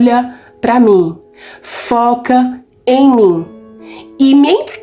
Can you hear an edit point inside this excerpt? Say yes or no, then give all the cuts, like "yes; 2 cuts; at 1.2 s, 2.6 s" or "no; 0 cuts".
no; 0 cuts